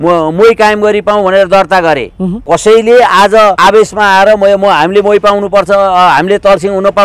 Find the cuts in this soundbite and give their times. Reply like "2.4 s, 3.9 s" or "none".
2.4 s, 3.6 s